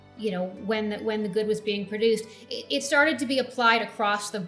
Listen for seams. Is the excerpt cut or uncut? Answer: uncut